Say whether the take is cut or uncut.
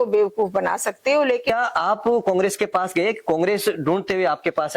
cut